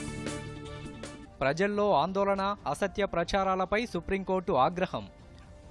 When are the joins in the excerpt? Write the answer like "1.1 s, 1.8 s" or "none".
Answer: 1.0 s